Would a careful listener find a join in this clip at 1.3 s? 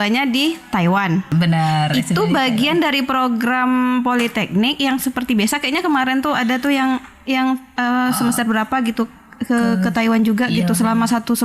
yes; 1 cut; at 1.3 s

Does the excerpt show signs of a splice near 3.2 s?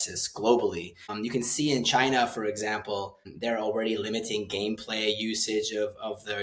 yes; 2 cuts; at 1.1 s, 3.2 s

